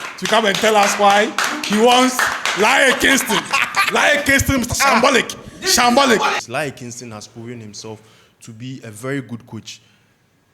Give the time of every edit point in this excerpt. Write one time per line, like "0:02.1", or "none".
0:06.4